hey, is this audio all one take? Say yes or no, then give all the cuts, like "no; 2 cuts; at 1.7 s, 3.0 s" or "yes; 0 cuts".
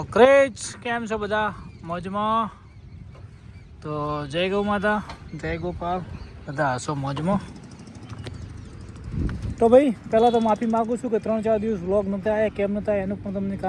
yes; 0 cuts